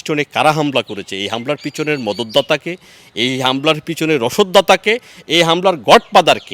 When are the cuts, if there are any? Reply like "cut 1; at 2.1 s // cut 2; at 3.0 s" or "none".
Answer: none